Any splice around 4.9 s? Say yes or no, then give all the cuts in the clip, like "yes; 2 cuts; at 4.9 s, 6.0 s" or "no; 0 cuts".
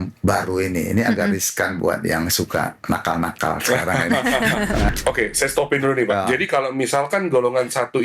yes; 1 cut; at 4.9 s